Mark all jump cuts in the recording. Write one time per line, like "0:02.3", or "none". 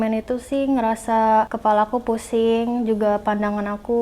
0:01.5